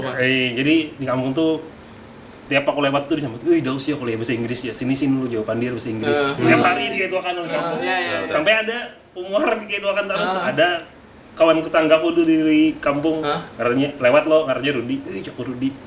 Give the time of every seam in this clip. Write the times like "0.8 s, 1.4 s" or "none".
none